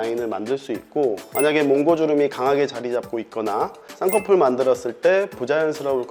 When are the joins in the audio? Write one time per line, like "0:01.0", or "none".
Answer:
none